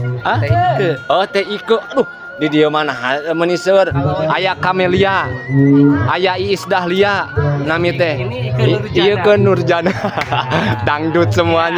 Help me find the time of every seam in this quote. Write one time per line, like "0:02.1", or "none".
none